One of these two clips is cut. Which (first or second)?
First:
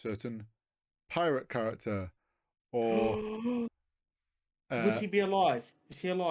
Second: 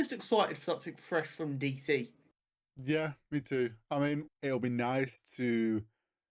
second